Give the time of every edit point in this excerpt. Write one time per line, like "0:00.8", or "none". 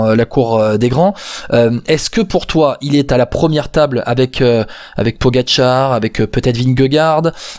none